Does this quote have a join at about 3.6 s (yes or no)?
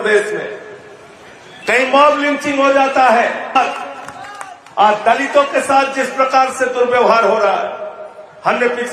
yes